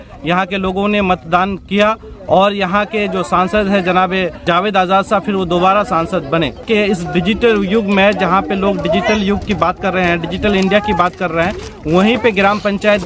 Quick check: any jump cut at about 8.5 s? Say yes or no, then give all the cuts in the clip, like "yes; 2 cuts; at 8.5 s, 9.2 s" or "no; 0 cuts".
no; 2 cuts; at 4.4 s, 6.6 s